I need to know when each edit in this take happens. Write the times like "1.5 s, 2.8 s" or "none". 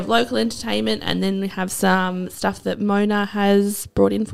none